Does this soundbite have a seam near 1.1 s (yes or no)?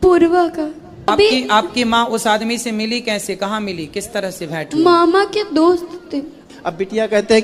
yes